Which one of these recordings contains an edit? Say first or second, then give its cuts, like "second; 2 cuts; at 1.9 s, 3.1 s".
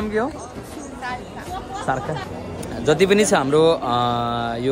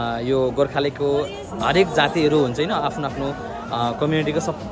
first; 1 cut; at 2.3 s